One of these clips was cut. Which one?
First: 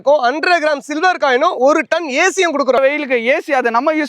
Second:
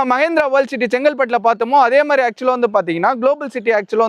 first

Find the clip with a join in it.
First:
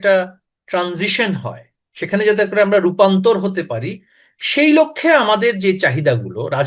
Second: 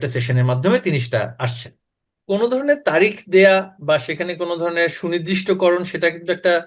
second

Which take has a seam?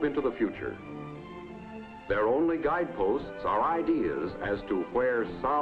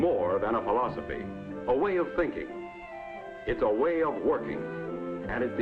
second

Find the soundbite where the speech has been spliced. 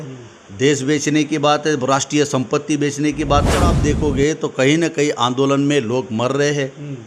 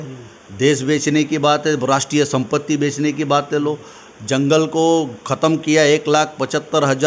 first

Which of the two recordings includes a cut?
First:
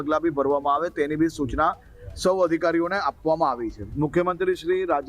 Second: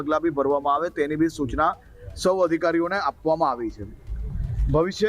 first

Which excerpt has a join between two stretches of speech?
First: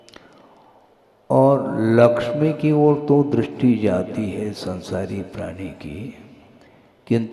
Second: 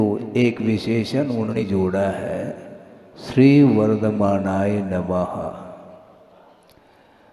second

